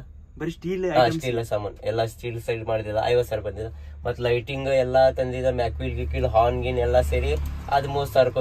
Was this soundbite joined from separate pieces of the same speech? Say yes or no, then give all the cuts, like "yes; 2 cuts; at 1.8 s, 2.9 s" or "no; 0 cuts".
no; 0 cuts